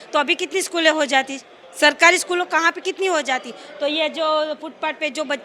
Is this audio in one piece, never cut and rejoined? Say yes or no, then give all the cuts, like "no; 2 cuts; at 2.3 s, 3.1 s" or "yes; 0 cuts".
yes; 0 cuts